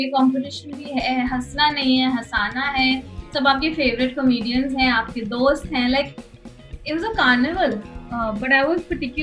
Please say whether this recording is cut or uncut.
cut